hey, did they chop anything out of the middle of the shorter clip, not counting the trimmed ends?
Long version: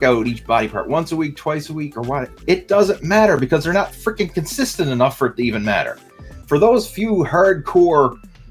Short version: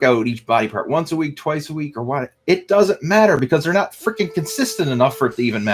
no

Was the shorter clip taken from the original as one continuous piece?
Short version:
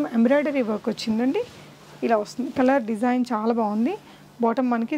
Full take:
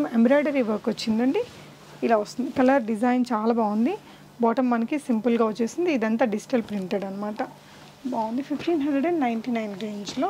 yes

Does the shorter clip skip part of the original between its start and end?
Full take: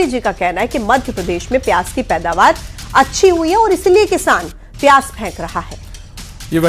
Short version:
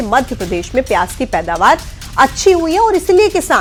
no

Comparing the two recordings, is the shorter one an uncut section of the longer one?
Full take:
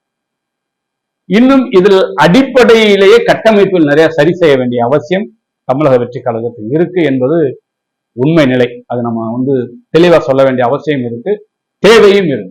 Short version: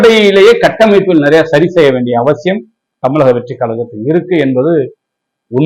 yes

